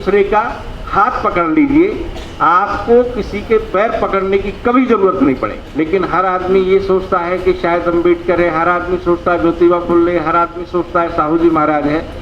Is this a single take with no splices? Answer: no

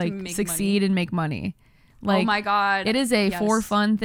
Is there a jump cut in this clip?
no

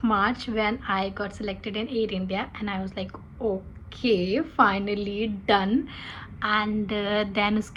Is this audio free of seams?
yes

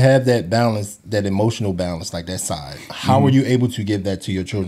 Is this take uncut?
yes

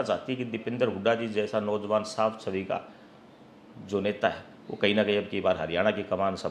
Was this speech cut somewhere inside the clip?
no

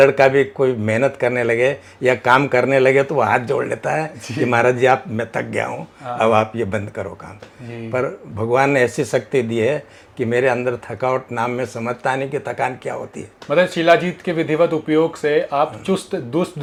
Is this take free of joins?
yes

